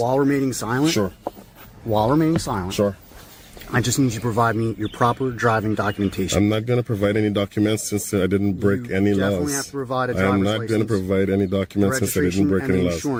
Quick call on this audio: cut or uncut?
uncut